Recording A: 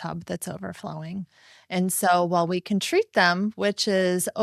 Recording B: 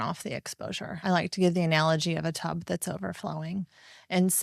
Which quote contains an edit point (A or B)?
B